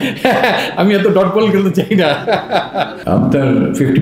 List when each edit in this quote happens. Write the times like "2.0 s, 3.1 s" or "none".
3.0 s